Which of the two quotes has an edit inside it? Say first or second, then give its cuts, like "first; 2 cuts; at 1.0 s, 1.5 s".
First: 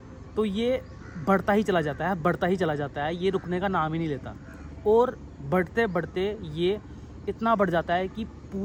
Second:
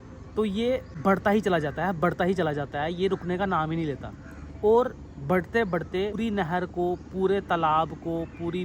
second; 2 cuts; at 0.9 s, 6.2 s